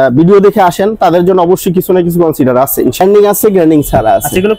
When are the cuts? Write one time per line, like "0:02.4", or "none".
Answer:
0:03.0